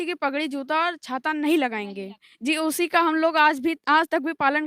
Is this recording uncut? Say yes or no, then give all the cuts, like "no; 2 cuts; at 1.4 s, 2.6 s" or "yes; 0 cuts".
yes; 0 cuts